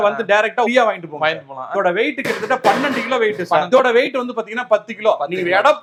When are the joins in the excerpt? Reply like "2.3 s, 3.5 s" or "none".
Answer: none